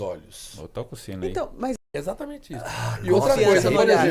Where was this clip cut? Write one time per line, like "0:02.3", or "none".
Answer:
0:01.8